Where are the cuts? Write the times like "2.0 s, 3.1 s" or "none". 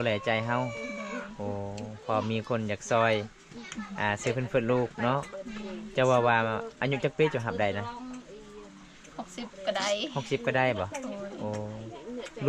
none